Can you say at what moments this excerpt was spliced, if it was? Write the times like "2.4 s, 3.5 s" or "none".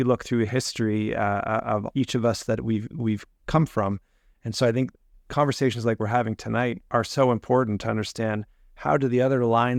none